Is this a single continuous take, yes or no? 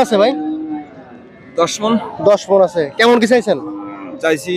yes